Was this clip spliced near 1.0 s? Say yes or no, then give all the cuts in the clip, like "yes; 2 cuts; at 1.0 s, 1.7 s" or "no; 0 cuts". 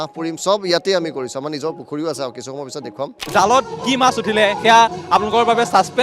no; 1 cut; at 3.2 s